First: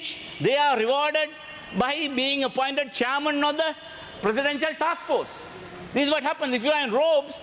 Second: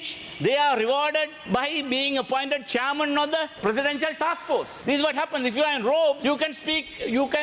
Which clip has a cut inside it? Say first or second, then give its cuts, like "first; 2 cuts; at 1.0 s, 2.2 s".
second; 4 cuts; at 1.4 s, 3.5 s, 4.7 s, 6.2 s